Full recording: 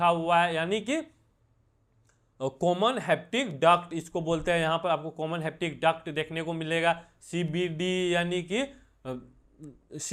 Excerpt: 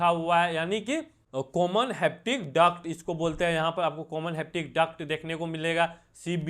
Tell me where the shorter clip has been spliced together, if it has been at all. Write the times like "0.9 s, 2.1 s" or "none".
1.2 s